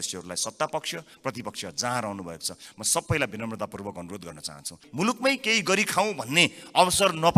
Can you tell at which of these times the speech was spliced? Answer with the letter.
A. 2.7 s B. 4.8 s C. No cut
B